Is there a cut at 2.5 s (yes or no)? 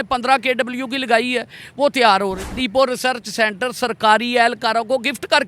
yes